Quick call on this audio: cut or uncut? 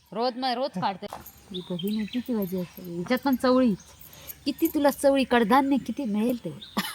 cut